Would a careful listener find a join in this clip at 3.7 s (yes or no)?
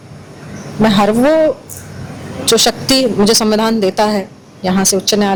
no